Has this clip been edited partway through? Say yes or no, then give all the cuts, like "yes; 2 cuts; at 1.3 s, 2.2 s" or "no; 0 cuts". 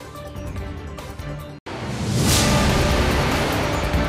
yes; 1 cut; at 1.6 s